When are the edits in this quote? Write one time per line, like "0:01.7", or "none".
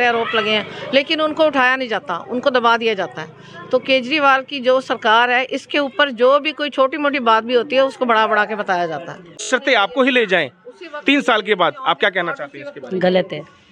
0:09.5